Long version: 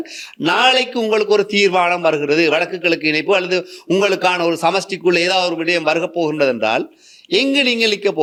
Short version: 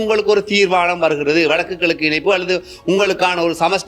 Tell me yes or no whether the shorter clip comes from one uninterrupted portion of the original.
yes